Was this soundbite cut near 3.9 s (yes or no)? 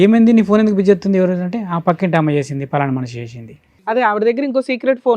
yes